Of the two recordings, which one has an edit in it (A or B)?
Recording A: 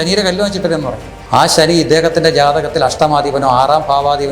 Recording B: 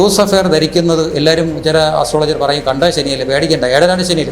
A